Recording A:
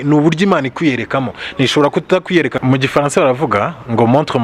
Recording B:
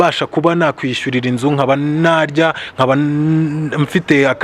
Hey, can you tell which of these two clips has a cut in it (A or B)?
A